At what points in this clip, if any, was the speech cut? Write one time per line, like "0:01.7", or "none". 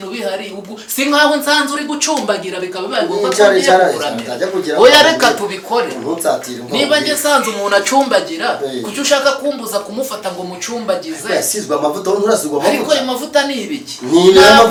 none